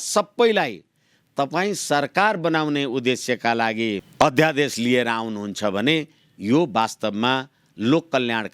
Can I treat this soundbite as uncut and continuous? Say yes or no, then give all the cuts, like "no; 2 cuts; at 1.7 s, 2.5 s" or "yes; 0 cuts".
no; 1 cut; at 4.1 s